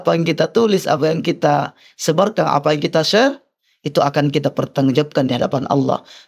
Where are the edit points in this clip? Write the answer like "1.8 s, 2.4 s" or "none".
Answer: none